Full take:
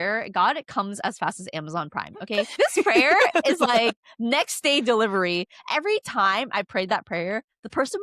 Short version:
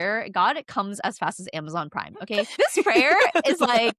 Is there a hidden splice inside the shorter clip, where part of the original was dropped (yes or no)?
no